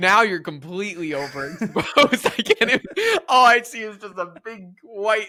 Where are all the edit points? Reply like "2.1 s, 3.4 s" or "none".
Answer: none